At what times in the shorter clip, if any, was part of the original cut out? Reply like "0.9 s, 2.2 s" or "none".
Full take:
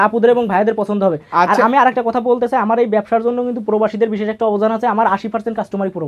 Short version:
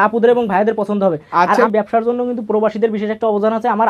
1.7 s